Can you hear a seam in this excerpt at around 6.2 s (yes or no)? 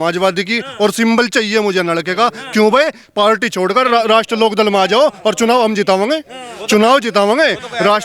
no